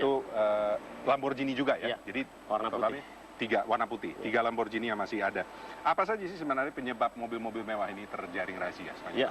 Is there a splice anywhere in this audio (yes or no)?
yes